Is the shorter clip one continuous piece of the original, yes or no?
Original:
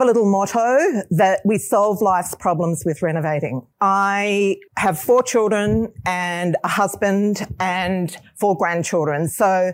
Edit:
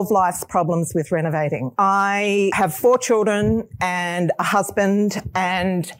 no